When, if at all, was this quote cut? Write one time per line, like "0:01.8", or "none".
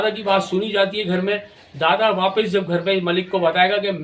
none

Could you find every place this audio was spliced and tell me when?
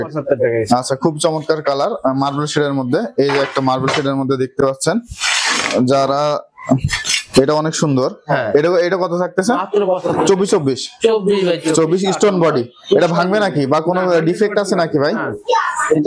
none

